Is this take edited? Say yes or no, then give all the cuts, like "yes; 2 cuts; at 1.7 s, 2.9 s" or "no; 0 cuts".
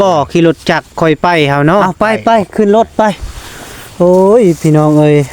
yes; 1 cut; at 1.9 s